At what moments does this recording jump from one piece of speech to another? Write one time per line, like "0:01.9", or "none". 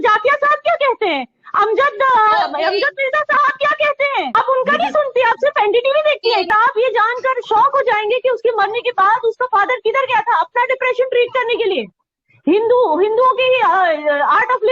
0:04.3
0:06.5